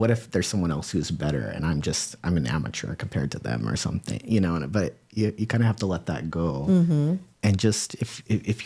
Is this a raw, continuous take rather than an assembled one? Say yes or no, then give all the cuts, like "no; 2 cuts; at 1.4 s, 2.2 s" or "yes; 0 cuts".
yes; 0 cuts